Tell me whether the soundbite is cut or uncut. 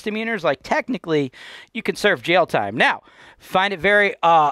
uncut